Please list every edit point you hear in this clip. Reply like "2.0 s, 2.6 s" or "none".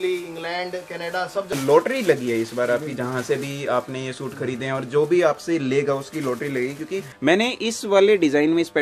1.5 s, 7.1 s